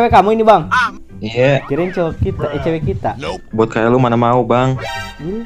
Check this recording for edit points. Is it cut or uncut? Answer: uncut